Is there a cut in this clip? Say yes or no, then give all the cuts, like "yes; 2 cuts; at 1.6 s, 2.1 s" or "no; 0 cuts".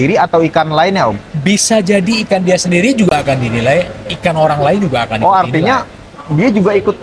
no; 0 cuts